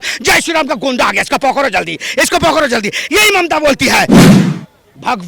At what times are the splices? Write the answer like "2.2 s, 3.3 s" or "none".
none